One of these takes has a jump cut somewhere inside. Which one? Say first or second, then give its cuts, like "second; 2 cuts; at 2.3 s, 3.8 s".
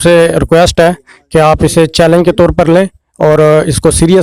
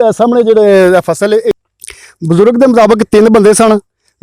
second; 1 cut; at 1.6 s